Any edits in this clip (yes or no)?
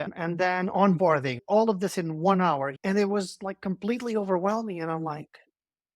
yes